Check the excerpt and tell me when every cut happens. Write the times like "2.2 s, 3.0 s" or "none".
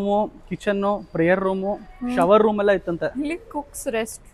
none